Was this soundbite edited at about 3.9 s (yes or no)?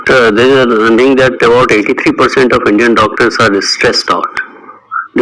no